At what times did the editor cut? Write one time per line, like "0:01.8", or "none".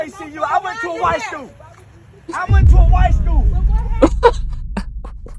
none